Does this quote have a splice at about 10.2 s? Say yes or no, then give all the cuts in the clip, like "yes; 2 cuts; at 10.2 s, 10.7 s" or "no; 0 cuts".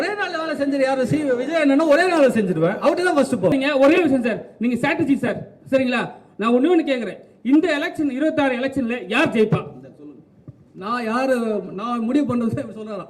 no; 1 cut; at 3.5 s